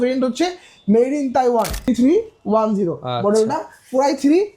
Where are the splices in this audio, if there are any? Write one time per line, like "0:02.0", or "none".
0:01.9